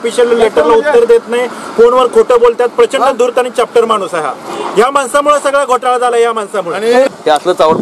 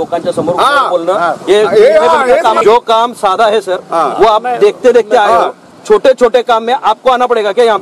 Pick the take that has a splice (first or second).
second